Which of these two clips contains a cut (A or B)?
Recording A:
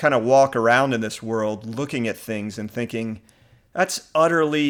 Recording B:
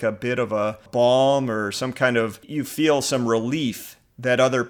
B